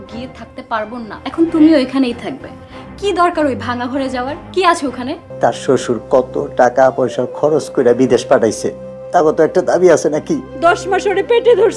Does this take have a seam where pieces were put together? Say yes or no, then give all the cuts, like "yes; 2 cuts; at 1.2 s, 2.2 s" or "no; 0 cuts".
yes; 3 cuts; at 1.2 s, 5.3 s, 10.5 s